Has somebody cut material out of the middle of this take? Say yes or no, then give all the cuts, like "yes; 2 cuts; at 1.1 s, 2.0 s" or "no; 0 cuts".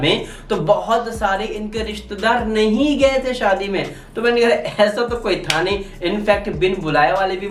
no; 0 cuts